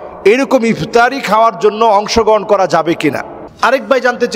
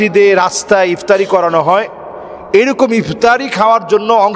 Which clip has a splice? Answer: first; 1 cut; at 3.4 s

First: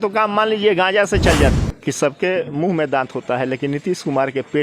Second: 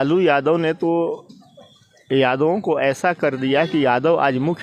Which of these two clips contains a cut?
first; 1 cut; at 1.5 s

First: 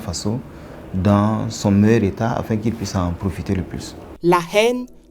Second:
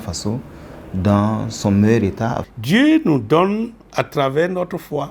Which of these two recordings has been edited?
second; 1 cut; at 2.5 s

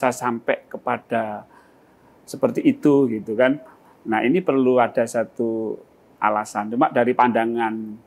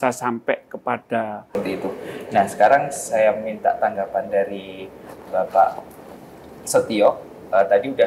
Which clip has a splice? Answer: second; 1 cut; at 1.6 s

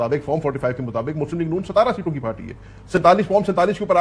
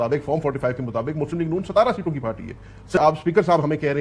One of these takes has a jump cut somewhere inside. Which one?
second; 1 cut; at 3.0 s

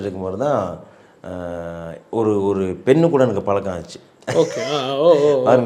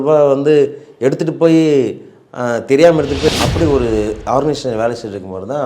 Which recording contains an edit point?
second; 1 cut; at 3.3 s

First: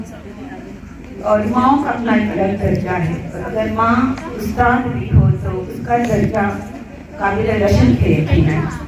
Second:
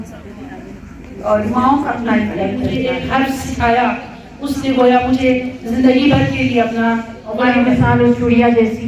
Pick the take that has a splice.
second; 2 cuts; at 2.7 s, 7.7 s

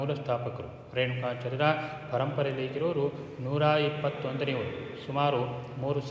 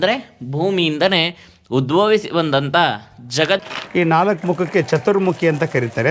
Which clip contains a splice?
second; 1 cut; at 3.6 s

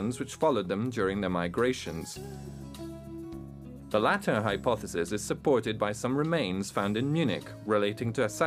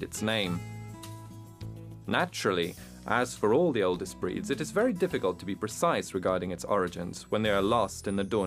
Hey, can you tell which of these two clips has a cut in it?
first; 1 cut; at 4.9 s

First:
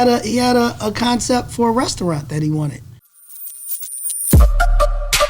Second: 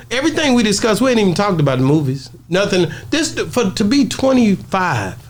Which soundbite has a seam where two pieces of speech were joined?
first; 1 cut; at 2.9 s

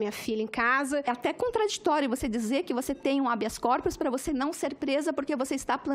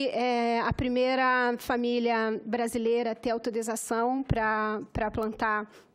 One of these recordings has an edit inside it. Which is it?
first; 1 cut; at 1.1 s

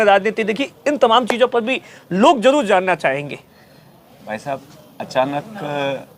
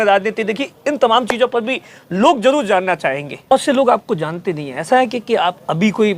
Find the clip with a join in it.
second; 1 cut; at 3.5 s

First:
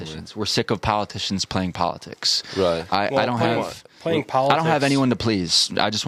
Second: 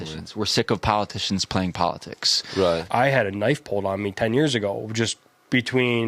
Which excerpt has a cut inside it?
second; 1 cut; at 2.8 s

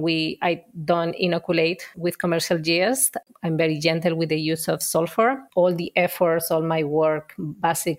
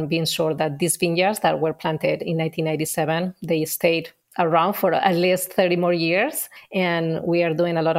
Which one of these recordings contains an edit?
first; 2 cuts; at 3.2 s, 5.4 s

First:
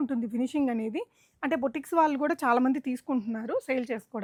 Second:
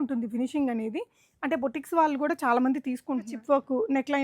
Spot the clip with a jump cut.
second; 1 cut; at 3.3 s

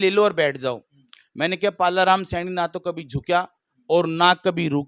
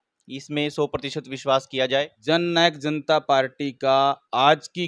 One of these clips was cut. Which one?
second; 1 cut; at 2.1 s

